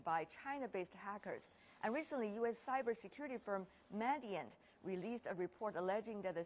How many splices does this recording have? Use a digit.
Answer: 0